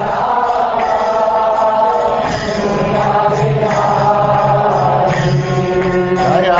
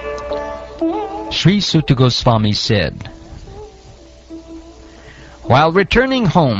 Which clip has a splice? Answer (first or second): first